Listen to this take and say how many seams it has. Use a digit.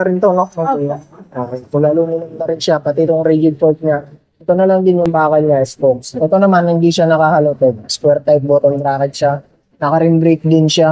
0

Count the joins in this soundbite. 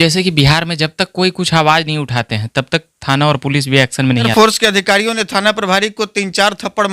1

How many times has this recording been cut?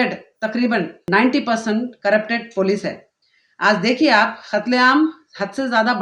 1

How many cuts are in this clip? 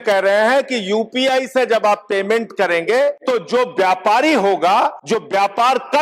2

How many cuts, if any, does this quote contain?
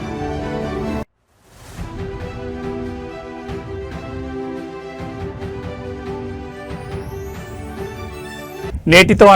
1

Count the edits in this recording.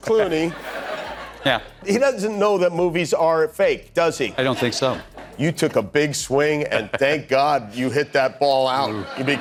0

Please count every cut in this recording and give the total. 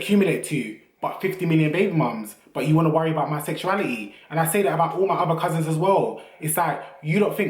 0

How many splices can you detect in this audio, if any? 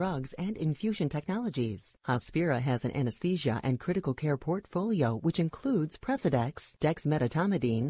1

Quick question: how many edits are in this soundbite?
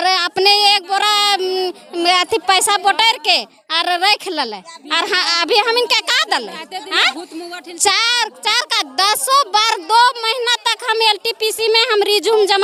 0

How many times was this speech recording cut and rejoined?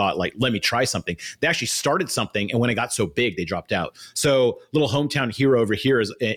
0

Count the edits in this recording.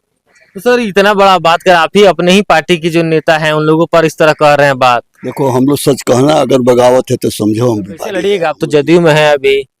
1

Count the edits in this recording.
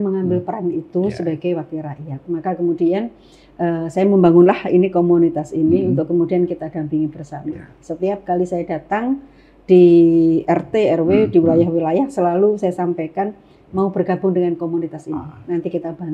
0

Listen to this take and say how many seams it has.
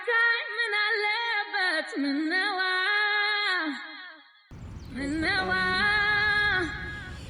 0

